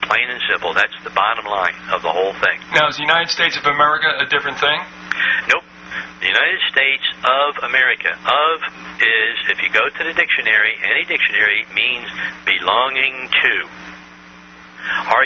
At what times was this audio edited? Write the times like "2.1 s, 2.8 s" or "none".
none